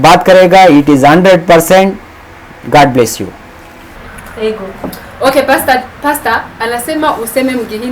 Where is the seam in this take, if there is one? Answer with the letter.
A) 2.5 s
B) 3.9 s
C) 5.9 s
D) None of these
B